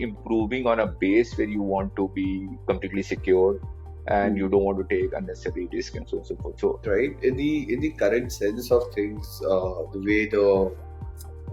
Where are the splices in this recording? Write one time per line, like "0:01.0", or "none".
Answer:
0:06.8